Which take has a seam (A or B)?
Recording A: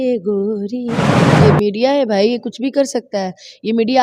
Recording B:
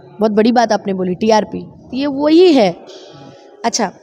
A